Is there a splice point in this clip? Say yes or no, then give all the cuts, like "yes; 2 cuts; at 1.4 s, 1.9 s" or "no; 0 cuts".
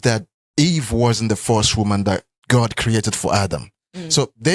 yes; 1 cut; at 3.6 s